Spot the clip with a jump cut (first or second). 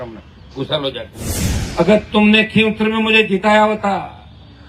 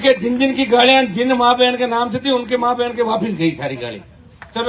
first